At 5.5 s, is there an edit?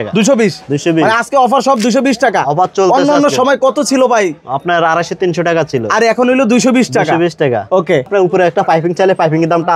no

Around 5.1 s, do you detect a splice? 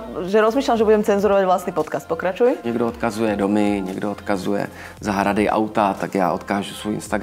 no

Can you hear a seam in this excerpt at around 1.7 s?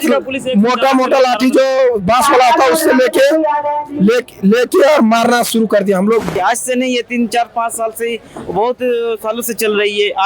no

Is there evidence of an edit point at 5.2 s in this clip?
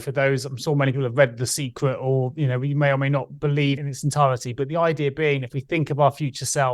no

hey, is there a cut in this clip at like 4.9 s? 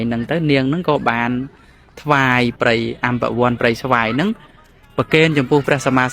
no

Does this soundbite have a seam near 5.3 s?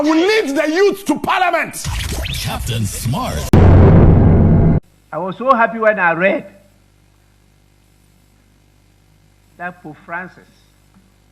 no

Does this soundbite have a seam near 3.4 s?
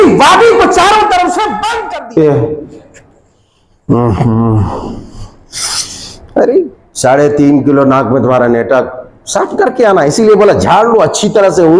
no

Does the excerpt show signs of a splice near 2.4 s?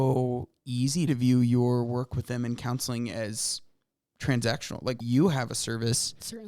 no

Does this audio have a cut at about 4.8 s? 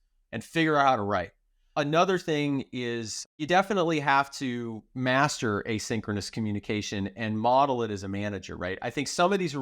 yes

